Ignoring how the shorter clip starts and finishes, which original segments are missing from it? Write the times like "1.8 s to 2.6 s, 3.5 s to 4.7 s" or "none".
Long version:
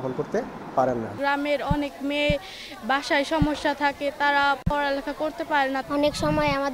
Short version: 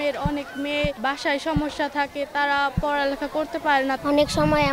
2.4 s to 2.8 s